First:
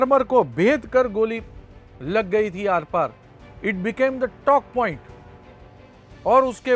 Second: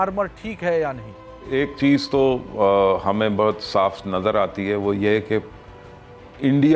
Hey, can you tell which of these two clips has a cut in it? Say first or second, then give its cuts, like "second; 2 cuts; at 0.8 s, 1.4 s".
second; 1 cut; at 1.4 s